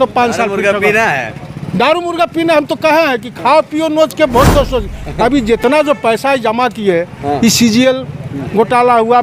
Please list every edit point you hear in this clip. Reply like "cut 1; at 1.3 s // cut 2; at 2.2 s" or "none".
none